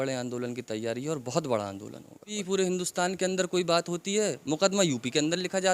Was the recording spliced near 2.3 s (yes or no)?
yes